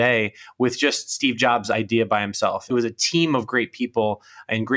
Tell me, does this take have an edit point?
yes; 1 cut; at 2.7 s

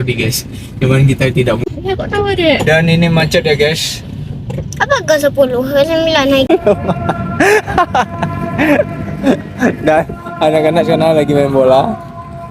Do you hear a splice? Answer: yes; 2 cuts; at 1.7 s, 6.5 s

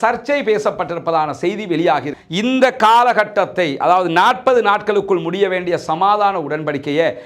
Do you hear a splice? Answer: yes; 1 cut; at 2.1 s

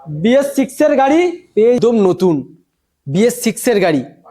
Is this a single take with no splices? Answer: no; 1 cut; at 1.8 s

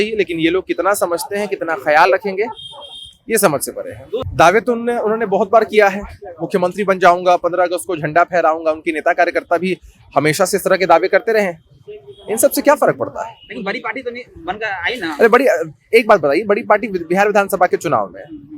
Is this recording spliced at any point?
yes; 1 cut; at 4.3 s

